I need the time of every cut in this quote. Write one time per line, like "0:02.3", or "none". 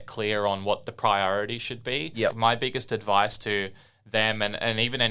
0:02.4